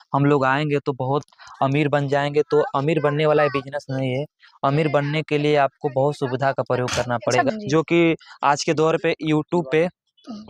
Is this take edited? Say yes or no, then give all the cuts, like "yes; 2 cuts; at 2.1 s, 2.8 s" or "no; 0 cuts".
yes; 1 cut; at 7.5 s